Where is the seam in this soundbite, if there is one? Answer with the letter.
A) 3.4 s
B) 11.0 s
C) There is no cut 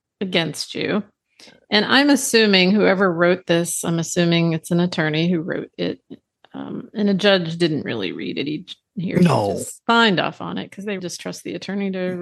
B